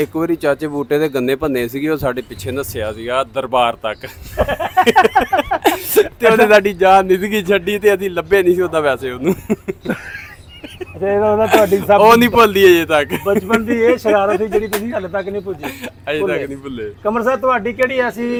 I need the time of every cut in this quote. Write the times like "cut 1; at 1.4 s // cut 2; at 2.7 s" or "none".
none